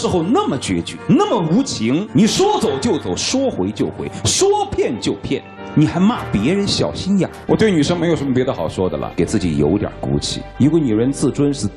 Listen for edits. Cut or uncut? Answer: cut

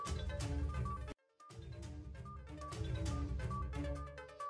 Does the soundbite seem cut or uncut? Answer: uncut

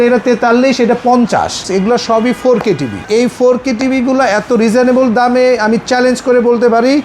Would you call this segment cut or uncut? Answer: cut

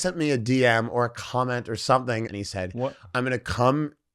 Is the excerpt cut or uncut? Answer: cut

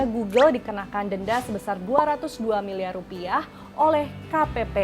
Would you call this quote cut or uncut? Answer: uncut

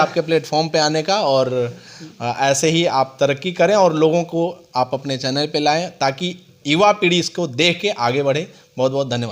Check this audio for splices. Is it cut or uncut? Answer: uncut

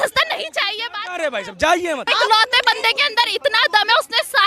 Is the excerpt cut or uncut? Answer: cut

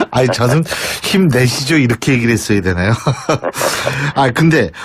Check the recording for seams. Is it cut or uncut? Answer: uncut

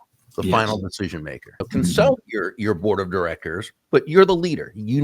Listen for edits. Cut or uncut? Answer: cut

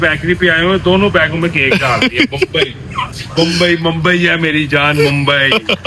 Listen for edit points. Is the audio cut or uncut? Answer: uncut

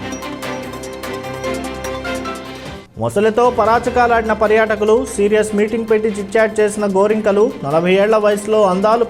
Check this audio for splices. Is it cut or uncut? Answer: uncut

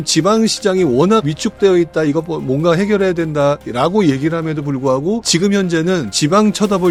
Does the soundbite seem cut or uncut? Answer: uncut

